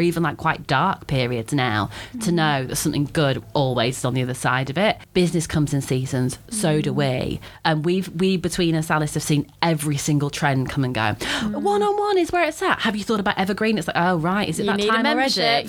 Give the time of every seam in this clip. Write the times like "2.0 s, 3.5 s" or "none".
none